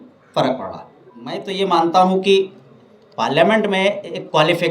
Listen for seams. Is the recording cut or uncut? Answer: cut